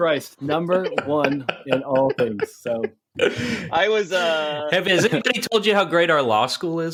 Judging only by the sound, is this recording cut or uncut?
uncut